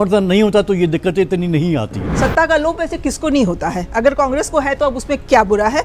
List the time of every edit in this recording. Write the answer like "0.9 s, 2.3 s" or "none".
2.1 s

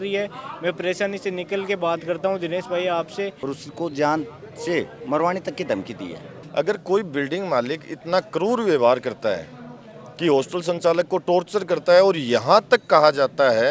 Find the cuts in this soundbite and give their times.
3.4 s, 6.3 s

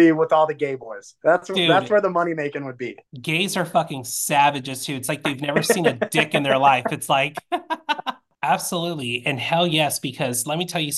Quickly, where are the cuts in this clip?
8.3 s

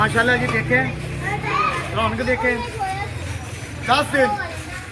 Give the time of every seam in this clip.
none

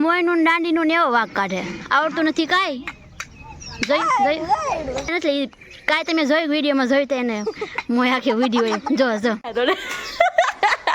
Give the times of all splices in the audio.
5.1 s, 9.5 s

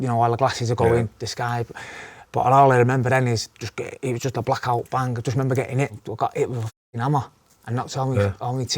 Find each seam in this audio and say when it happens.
2.1 s, 6.0 s

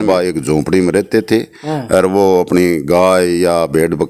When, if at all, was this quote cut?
none

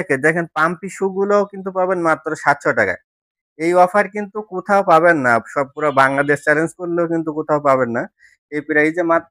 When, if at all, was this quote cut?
none

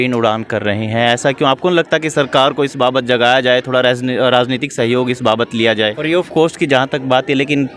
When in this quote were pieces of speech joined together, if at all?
6.0 s

